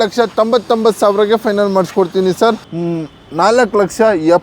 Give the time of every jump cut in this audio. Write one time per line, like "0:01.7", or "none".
0:02.6